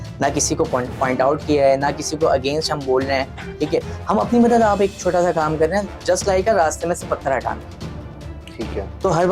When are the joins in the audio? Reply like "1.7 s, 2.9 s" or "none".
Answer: none